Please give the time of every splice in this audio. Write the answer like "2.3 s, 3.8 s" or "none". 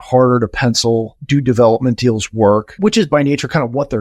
1.2 s, 2.8 s